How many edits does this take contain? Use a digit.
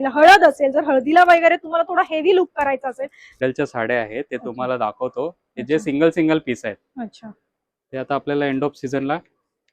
1